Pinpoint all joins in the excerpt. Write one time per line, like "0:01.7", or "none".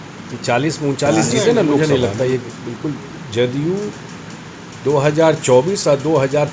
0:01.8